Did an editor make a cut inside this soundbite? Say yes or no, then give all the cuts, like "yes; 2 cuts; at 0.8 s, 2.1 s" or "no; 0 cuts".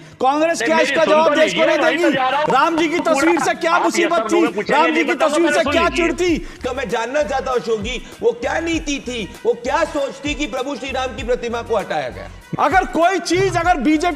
yes; 2 cuts; at 6.6 s, 12.4 s